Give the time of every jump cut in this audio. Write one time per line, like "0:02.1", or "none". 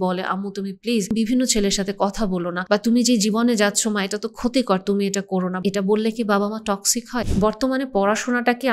0:01.1
0:02.5
0:05.5
0:07.2